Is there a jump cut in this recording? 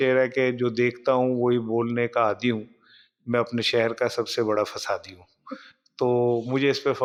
no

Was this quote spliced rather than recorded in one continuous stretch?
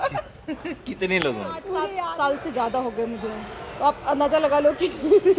yes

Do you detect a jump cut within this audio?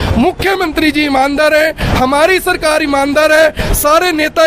no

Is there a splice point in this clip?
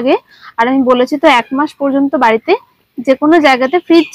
no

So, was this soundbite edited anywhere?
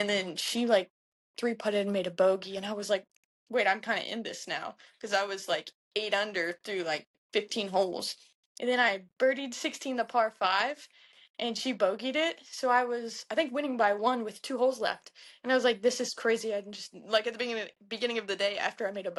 no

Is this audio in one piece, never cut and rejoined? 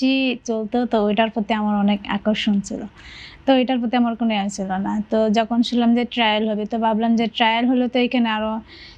yes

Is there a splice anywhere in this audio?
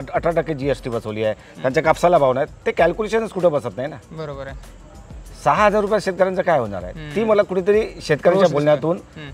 no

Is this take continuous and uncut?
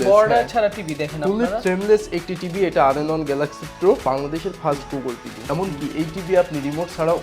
no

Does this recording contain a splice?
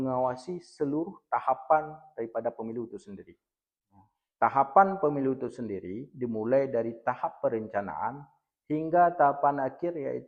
no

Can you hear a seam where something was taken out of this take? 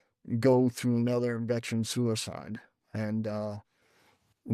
no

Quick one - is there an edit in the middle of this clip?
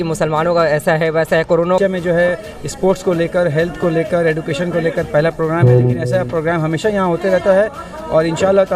yes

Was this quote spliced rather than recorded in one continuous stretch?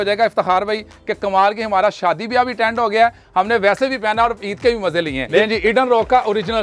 yes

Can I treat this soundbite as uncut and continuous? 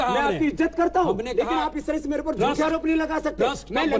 yes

